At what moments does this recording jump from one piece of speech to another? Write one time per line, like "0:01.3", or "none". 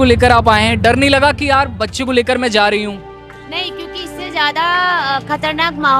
none